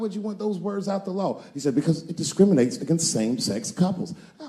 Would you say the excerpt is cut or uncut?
uncut